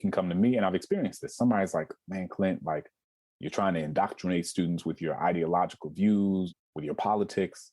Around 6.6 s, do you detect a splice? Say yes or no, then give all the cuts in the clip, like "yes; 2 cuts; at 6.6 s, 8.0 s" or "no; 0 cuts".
yes; 1 cut; at 6.6 s